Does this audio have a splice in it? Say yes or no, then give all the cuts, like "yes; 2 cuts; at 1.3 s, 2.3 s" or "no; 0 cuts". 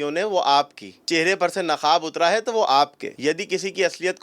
yes; 2 cuts; at 1.0 s, 3.1 s